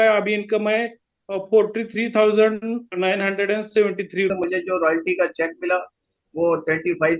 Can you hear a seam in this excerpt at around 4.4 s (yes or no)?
yes